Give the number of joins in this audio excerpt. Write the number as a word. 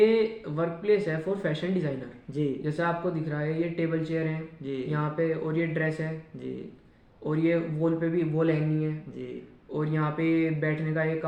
zero